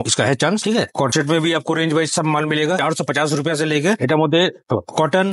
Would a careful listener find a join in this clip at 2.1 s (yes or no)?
no